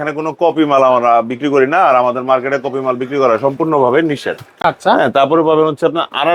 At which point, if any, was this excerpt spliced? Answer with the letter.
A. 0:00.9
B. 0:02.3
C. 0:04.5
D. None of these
D